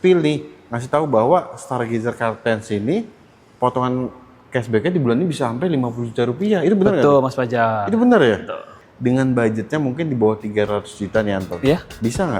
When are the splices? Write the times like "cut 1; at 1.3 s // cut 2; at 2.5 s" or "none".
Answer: cut 1; at 8.7 s